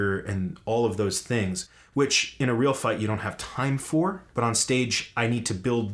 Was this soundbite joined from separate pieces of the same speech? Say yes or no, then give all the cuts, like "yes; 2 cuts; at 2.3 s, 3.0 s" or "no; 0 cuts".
yes; 1 cut; at 4.2 s